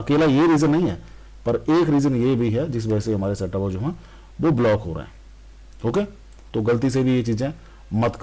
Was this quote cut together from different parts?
yes; 1 cut; at 6.4 s

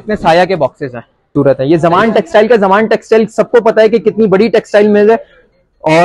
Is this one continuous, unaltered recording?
no; 1 cut; at 1.2 s

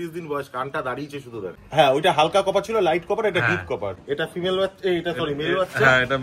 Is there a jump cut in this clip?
yes; 2 cuts; at 1.5 s, 4.0 s

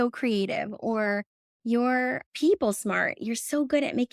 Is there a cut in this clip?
no; 0 cuts

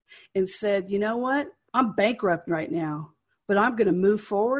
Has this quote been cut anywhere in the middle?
yes; 1 cut; at 1.6 s

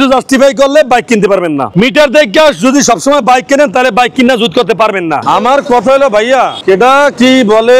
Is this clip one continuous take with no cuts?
no; 1 cut; at 5.2 s

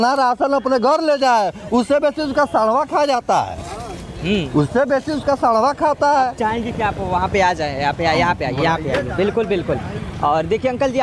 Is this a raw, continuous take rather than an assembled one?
yes; 0 cuts

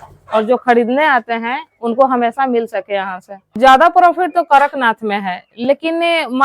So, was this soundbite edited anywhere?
yes; 1 cut; at 3.3 s

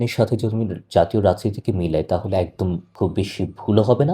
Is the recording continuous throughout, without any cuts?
no; 1 cut; at 2.9 s

